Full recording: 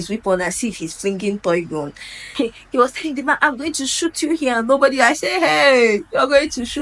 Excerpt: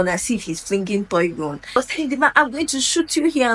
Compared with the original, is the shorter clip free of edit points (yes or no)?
no